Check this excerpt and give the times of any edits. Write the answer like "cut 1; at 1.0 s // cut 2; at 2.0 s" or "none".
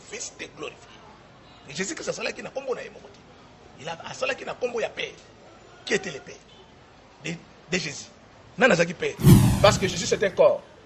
cut 1; at 9.2 s